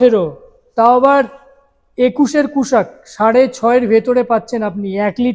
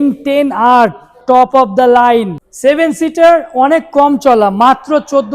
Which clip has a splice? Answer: second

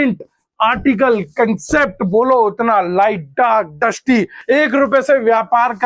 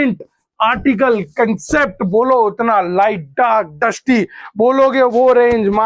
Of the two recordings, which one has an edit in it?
first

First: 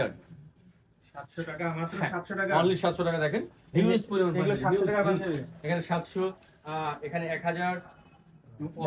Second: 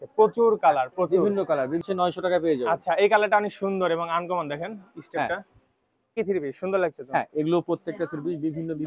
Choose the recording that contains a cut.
second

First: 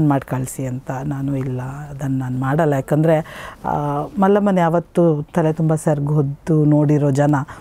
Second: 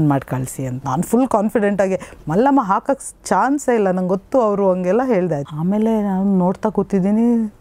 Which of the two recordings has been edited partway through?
second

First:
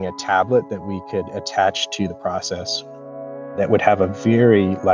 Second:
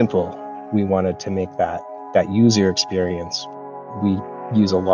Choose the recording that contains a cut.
second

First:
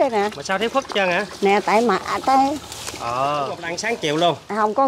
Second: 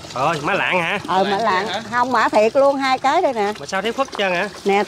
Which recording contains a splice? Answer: first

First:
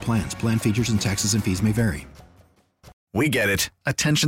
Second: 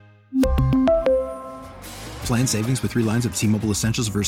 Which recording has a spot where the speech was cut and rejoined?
first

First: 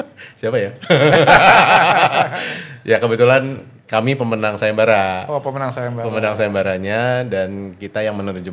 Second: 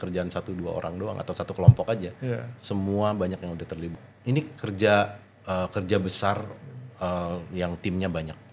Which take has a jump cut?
second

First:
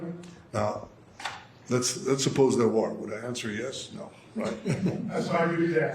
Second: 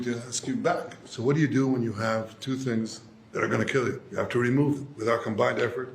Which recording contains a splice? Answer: second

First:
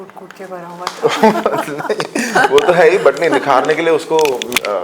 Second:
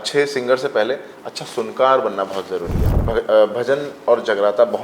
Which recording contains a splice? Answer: second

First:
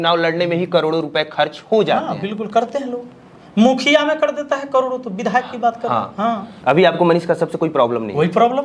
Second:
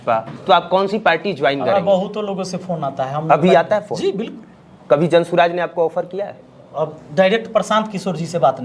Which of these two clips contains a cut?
first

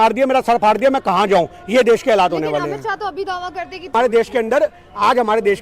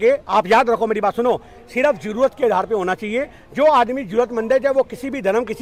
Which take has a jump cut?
first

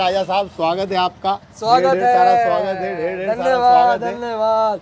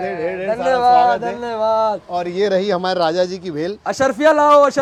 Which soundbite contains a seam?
first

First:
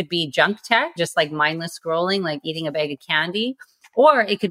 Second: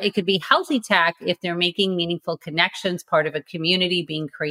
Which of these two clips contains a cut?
first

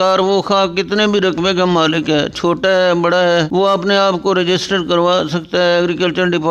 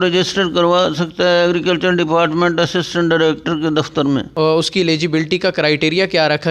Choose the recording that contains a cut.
second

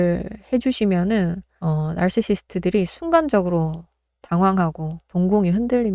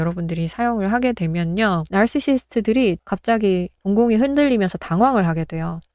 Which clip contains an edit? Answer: second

